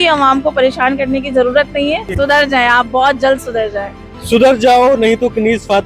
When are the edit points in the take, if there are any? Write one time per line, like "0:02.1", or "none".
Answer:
0:02.1

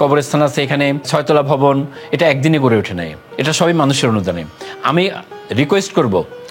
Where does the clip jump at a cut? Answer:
0:01.1
0:03.3

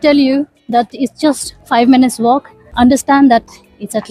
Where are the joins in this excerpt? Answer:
0:02.6

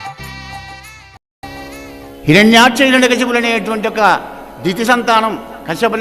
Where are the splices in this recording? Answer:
0:01.4

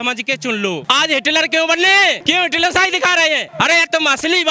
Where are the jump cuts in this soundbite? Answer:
0:00.8
0:02.2
0:03.5

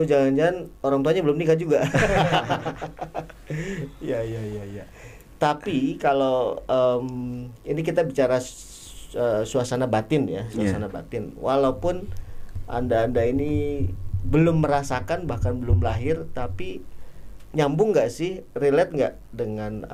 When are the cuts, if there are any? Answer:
none

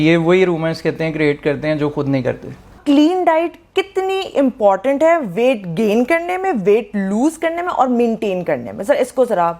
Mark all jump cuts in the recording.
0:02.8

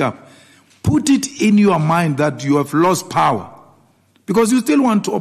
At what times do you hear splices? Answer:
none

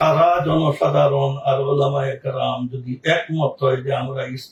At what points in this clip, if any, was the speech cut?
none

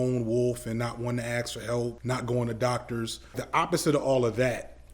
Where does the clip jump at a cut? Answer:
0:02.0
0:03.4

